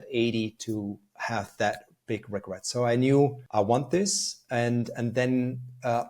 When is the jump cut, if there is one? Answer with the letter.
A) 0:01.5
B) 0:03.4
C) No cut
B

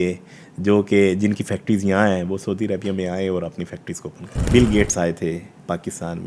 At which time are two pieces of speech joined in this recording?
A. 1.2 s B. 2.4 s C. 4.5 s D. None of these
C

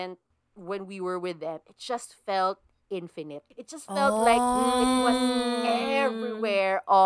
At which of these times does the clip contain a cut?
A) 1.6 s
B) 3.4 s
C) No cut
B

